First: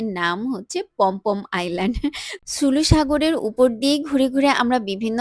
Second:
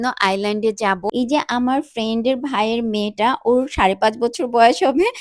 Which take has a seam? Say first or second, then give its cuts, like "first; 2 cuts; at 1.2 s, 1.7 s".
second; 1 cut; at 1.1 s